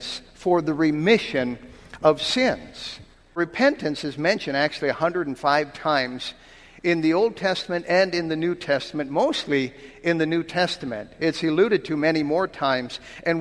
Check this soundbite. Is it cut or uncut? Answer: cut